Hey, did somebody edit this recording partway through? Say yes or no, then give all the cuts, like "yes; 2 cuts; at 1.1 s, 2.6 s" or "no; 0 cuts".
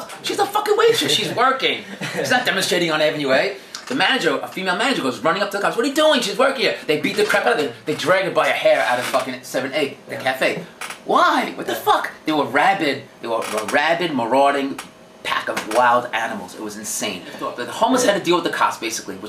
yes; 1 cut; at 17.6 s